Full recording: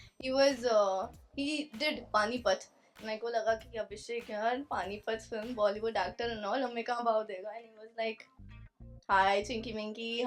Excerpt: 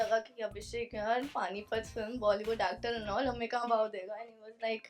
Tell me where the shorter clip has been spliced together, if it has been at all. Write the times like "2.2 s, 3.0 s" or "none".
none